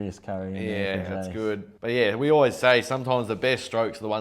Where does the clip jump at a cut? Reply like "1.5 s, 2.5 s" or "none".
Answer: 1.7 s